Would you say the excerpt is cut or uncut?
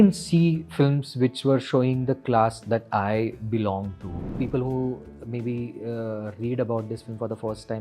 cut